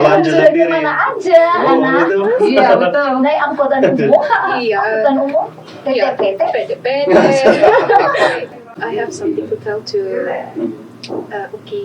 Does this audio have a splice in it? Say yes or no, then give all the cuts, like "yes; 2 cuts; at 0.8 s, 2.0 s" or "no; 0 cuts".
yes; 1 cut; at 8.5 s